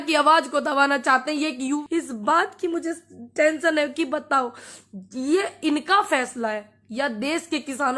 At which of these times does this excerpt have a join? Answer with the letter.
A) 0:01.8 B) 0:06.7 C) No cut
A